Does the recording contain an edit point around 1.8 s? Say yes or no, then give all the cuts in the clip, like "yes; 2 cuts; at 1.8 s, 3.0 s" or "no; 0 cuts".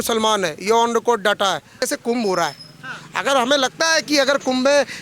yes; 1 cut; at 1.8 s